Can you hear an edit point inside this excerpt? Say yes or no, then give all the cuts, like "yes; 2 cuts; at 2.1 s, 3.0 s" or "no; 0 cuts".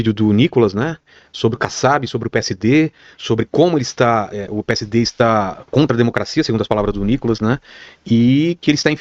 no; 0 cuts